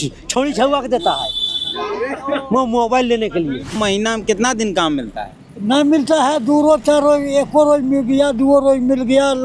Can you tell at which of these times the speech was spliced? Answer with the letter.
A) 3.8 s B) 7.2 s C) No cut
A